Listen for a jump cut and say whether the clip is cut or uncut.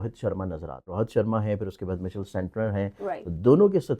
cut